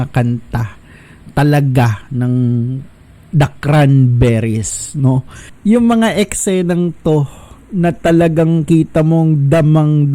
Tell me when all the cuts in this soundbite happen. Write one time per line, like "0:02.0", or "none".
0:05.5